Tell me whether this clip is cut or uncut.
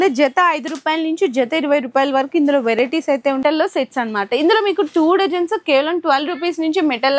cut